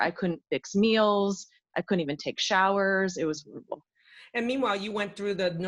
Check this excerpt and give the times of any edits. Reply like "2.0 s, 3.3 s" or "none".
none

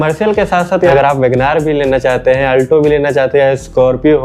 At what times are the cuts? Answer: 0.9 s

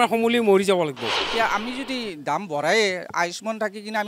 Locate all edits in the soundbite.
1.2 s

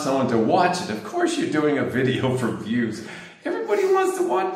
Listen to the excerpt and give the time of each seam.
none

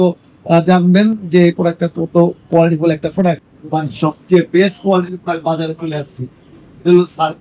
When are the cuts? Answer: 3.5 s

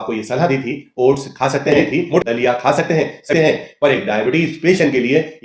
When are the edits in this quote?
2.2 s, 3.3 s

